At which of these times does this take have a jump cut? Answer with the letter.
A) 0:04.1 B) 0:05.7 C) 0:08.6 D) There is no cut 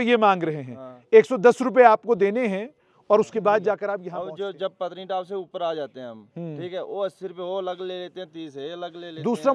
A